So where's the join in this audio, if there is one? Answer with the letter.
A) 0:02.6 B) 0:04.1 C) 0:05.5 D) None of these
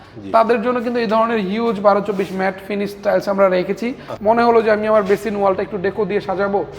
B